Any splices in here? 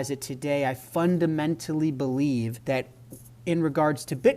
yes; 1 cut; at 2.6 s

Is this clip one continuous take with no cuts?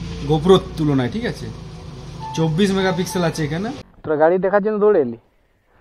no; 1 cut; at 3.9 s

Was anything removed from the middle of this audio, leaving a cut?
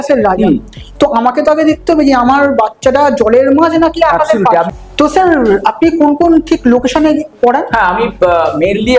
no; 0 cuts

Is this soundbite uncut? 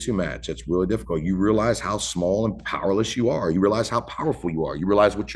yes; 0 cuts

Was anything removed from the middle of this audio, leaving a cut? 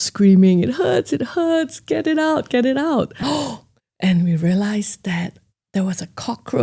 yes; 1 cut; at 3.2 s

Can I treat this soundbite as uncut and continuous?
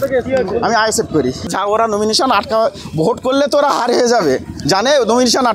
no; 1 cut; at 1.5 s

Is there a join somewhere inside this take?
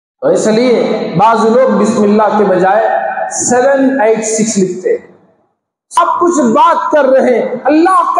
yes; 1 cut; at 6.0 s

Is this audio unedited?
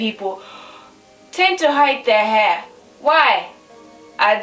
yes; 0 cuts

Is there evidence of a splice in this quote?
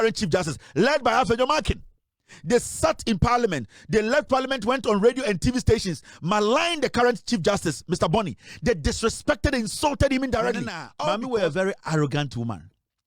yes; 1 cut; at 10.8 s

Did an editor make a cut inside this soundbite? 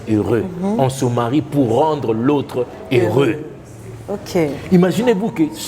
no; 0 cuts

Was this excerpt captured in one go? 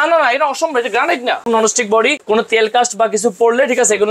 no; 1 cut; at 1.9 s

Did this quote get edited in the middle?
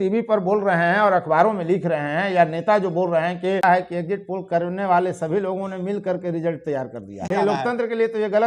yes; 2 cuts; at 3.6 s, 7.3 s

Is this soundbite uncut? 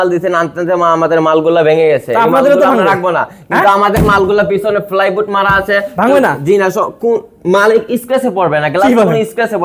yes; 0 cuts

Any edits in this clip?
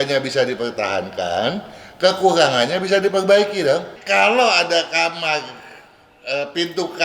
yes; 1 cut; at 3.9 s

